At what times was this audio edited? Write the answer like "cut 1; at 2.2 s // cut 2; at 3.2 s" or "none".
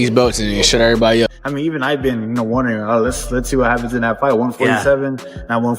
cut 1; at 1.4 s